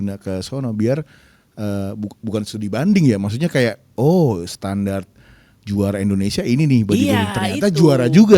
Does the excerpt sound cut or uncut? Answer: uncut